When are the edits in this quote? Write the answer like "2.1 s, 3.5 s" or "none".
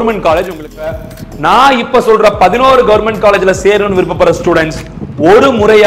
1.0 s